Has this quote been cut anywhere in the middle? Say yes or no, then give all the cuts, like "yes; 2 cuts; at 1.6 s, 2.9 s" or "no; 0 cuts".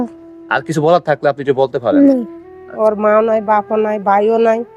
yes; 1 cut; at 2.7 s